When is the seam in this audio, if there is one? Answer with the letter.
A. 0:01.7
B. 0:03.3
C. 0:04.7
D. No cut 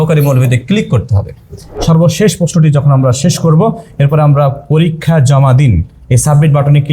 A